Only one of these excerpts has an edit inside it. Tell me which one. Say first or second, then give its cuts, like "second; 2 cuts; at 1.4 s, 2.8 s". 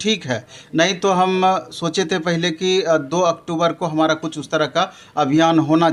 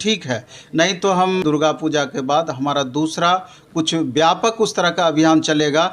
second; 1 cut; at 1.4 s